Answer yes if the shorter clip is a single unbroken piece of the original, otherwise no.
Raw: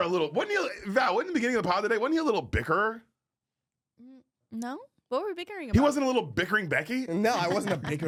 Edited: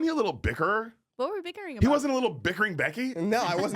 no